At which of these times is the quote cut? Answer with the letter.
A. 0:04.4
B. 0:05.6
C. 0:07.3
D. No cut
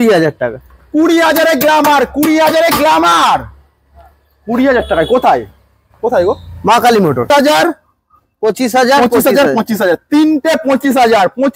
C